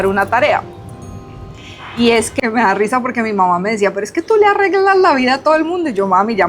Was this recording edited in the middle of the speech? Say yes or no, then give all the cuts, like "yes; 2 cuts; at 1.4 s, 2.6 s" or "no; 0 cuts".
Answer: yes; 1 cut; at 2.4 s